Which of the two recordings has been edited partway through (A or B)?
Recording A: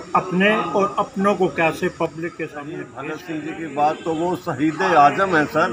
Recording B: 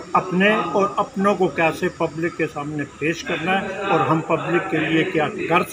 A